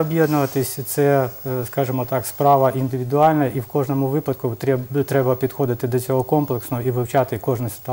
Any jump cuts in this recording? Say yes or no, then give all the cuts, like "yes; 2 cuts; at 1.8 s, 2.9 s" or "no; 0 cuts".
no; 0 cuts